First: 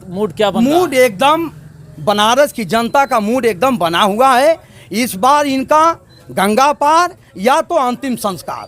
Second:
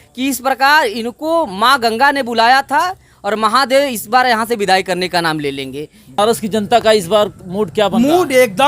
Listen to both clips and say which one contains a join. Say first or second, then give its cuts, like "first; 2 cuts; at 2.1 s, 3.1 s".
second; 1 cut; at 6.2 s